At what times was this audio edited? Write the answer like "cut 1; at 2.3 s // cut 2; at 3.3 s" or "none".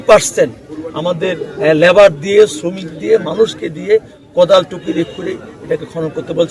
none